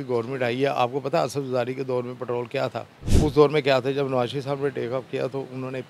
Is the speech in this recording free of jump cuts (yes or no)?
no